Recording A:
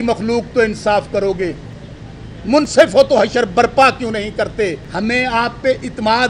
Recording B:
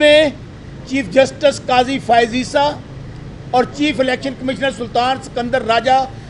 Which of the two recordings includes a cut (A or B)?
A